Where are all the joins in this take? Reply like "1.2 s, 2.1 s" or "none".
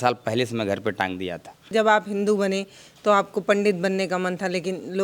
1.7 s